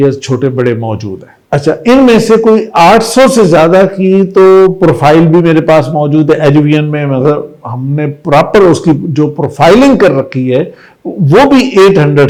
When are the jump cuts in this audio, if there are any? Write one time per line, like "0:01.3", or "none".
none